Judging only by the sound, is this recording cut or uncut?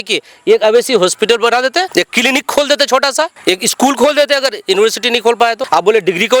cut